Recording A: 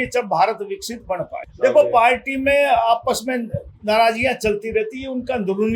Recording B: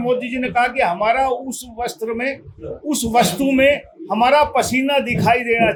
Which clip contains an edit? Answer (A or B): A